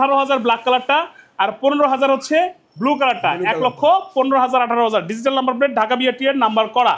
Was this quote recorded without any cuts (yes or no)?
yes